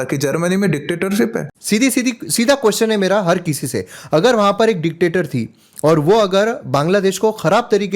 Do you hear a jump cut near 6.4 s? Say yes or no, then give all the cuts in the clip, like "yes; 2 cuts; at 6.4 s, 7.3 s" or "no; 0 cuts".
no; 1 cut; at 1.5 s